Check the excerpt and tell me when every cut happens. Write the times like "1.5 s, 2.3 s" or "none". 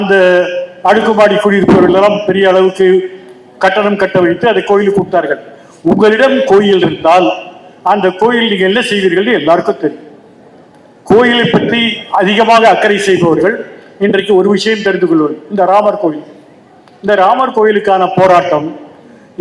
none